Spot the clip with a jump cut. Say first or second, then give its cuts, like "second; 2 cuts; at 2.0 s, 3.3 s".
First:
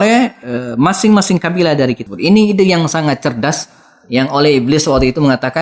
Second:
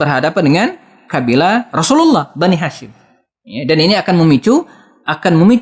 first; 1 cut; at 2.0 s